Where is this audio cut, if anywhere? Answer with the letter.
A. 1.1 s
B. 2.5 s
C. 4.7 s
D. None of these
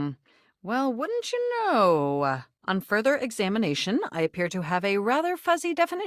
B